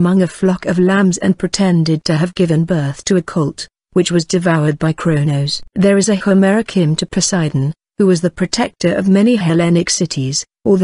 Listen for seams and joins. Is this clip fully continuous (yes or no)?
no